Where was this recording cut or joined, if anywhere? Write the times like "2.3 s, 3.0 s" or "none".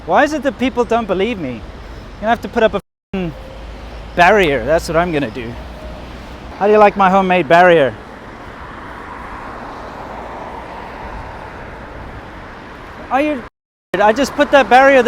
6.4 s